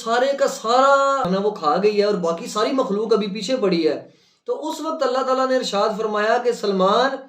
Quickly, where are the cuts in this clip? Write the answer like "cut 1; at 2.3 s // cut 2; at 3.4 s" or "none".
cut 1; at 1.3 s